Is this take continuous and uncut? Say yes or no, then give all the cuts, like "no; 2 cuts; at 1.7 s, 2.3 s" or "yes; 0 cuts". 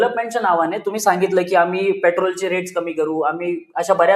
yes; 0 cuts